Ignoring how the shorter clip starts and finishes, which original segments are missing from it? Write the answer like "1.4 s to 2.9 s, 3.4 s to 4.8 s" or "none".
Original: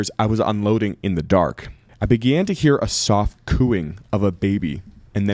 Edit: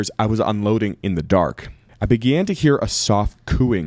none

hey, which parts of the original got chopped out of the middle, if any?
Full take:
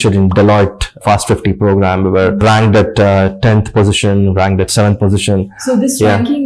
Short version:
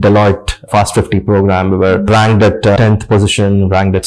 3.1 s to 3.4 s

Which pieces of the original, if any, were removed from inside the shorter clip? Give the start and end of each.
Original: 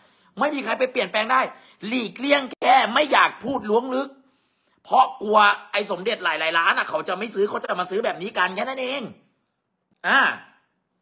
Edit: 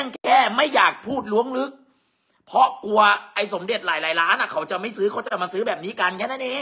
none

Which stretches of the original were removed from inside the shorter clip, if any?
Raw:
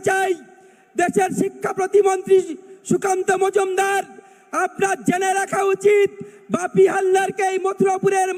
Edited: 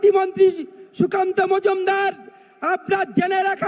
none

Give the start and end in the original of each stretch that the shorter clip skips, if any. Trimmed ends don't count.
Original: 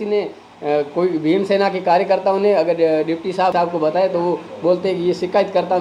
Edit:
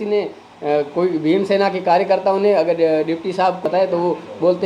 3.5 s to 3.8 s

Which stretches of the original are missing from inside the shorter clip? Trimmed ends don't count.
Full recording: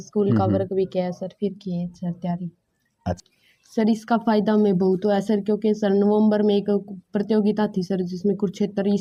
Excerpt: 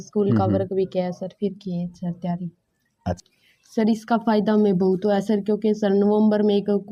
none

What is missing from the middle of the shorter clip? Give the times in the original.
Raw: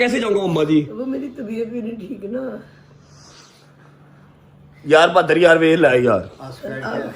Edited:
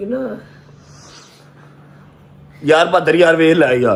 none

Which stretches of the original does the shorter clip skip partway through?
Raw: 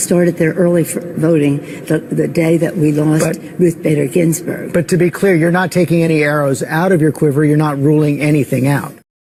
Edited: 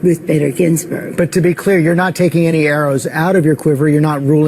none

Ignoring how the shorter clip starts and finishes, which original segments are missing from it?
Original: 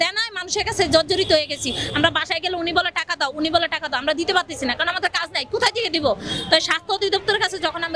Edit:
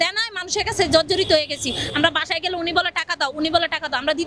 none

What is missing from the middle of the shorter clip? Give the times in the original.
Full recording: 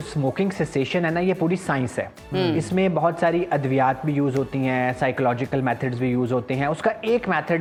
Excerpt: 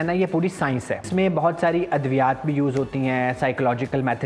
2.1 s to 2.7 s

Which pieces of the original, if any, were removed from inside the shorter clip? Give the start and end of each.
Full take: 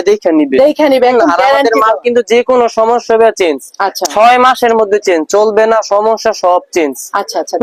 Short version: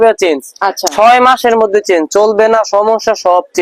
none

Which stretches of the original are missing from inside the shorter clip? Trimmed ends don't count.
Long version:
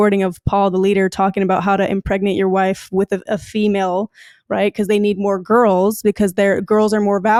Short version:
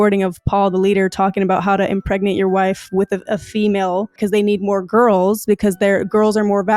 4.2 s to 4.7 s

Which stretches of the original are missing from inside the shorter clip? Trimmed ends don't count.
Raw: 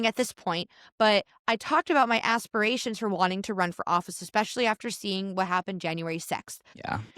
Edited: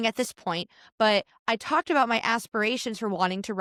none

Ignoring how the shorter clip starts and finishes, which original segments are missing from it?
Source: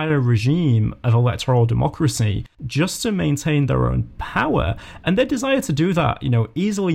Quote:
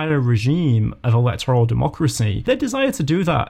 2.5 s to 5.2 s

